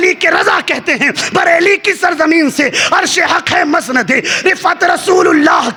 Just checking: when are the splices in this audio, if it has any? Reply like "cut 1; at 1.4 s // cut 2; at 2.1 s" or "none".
none